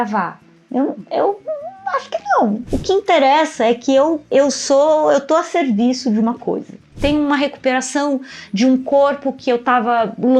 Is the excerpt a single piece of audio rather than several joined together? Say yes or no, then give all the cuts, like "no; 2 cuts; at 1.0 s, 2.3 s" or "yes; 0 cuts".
no; 2 cuts; at 2.6 s, 6.9 s